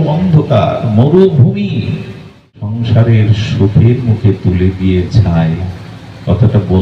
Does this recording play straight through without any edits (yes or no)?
no